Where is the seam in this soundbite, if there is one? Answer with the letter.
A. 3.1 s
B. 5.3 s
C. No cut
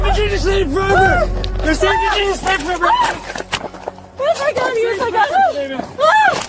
B